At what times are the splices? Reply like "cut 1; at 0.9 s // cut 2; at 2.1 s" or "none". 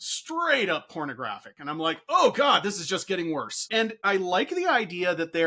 none